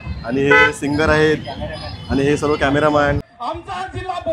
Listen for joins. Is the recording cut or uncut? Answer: cut